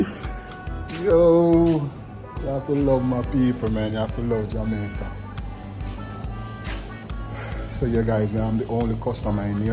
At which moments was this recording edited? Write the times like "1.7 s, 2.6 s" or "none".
none